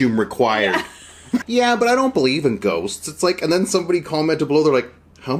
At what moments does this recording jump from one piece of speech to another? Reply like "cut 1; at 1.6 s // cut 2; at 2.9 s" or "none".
cut 1; at 1.4 s

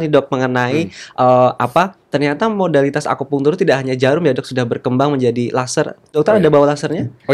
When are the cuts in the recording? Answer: none

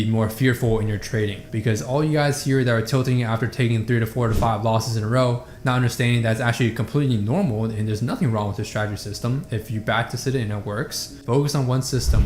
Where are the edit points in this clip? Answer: cut 1; at 11.1 s

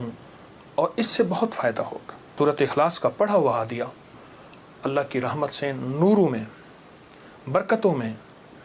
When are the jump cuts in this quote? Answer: cut 1; at 2.3 s

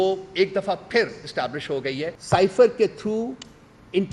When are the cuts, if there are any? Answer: cut 1; at 2.1 s

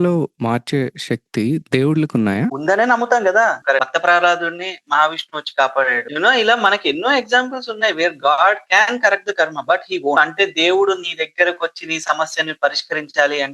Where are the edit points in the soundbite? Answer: cut 1; at 3.6 s

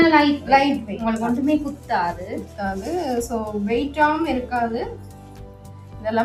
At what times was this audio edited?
none

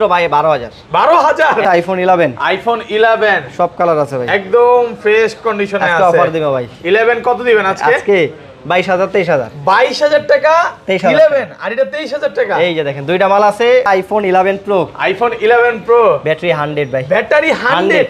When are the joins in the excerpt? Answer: cut 1; at 1.6 s // cut 2; at 14.0 s

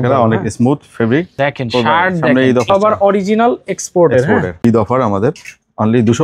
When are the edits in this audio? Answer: cut 1; at 1.3 s // cut 2; at 2.7 s // cut 3; at 4.6 s

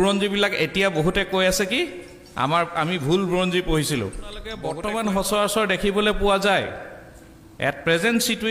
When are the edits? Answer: cut 1; at 4.6 s

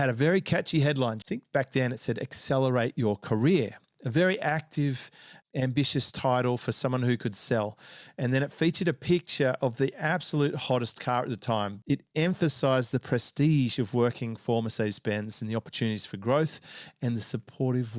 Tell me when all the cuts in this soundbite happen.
cut 1; at 1.2 s // cut 2; at 11.7 s

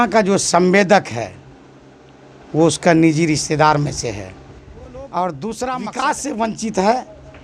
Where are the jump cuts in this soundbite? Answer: cut 1; at 5.9 s

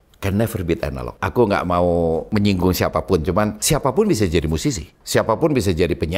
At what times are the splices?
cut 1; at 1.2 s // cut 2; at 2.3 s // cut 3; at 3.6 s // cut 4; at 4.9 s

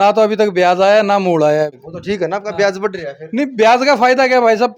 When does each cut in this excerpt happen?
none

